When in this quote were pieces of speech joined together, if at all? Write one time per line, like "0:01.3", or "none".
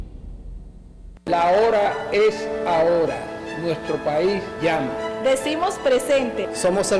0:01.4